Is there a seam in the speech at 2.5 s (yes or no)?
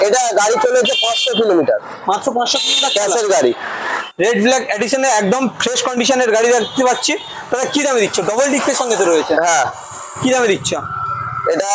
no